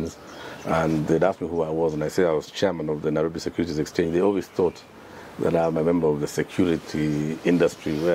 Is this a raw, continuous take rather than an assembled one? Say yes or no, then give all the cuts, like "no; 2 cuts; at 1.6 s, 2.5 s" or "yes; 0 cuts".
yes; 0 cuts